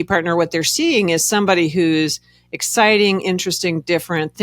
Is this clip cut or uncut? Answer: uncut